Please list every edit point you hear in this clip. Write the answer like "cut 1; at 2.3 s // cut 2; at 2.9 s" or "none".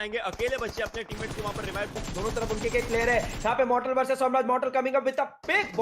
cut 1; at 2.0 s